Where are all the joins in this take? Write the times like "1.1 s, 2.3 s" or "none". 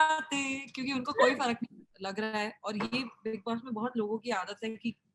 1.9 s